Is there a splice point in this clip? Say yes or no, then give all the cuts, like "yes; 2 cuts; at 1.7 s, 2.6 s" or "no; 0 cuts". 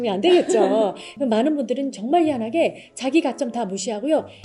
yes; 1 cut; at 1.0 s